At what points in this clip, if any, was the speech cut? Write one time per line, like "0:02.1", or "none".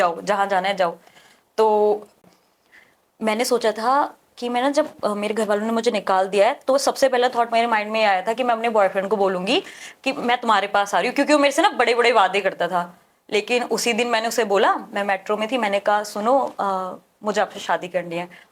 0:02.2